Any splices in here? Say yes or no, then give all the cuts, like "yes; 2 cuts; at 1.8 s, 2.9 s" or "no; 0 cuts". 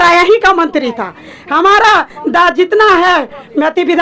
no; 0 cuts